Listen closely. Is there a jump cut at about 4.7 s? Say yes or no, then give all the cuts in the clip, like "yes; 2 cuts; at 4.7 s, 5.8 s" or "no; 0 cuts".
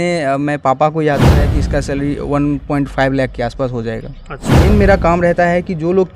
yes; 2 cuts; at 1.3 s, 4.7 s